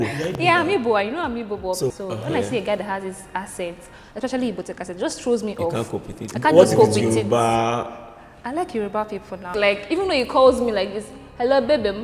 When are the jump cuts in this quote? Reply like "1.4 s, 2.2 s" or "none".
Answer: 2.0 s, 9.5 s